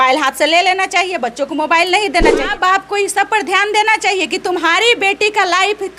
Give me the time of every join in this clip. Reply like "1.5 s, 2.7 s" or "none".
2.5 s